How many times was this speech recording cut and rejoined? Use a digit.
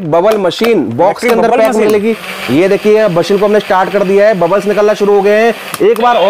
0